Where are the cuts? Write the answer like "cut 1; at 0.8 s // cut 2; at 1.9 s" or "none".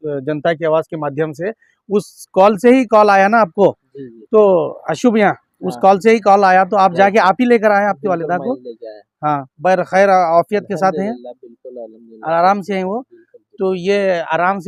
none